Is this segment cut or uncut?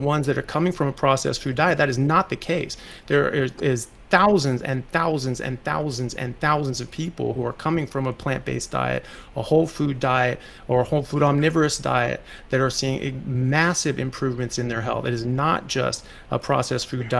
uncut